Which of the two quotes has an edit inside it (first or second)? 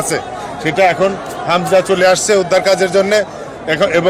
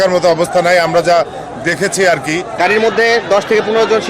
second